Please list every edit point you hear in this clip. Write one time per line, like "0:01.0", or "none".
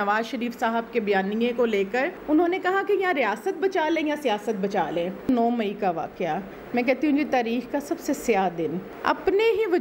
0:02.1
0:05.3
0:08.9